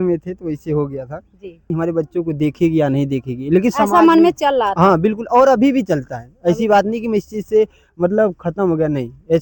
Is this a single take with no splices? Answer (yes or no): no